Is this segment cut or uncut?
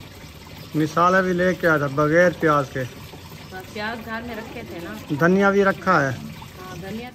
uncut